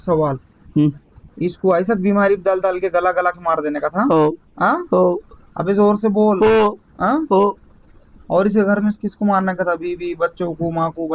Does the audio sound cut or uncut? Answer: uncut